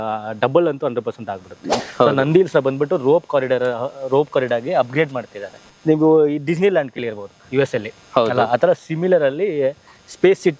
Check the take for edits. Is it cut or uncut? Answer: cut